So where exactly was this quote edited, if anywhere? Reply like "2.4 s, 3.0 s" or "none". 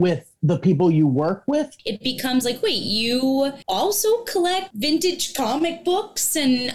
1.8 s, 3.6 s, 4.7 s